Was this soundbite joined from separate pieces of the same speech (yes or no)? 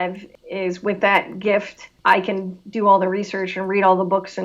no